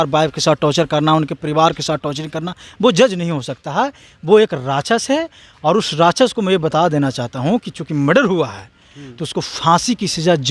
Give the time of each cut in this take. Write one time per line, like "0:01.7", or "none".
none